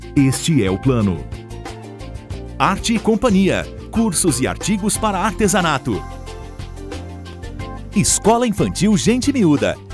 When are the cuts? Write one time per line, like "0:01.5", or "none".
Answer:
0:07.9